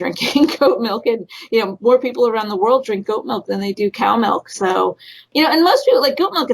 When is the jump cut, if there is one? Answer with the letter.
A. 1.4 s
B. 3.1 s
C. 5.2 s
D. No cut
C